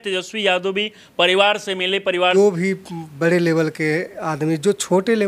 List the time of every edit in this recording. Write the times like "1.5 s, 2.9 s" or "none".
2.3 s